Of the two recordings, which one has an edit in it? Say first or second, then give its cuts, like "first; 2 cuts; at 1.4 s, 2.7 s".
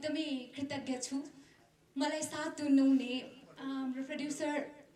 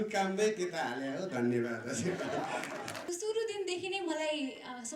second; 1 cut; at 3.0 s